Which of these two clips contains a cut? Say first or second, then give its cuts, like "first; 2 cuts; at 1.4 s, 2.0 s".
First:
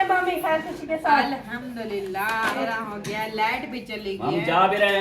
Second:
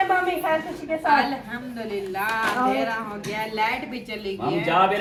first; 1 cut; at 2.6 s